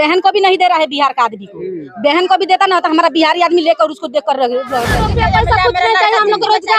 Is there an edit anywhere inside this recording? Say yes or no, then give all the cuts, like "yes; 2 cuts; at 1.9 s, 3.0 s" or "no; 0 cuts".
yes; 1 cut; at 5.0 s